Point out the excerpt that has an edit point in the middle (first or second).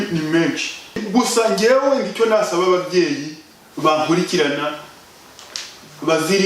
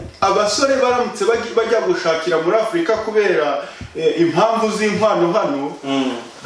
first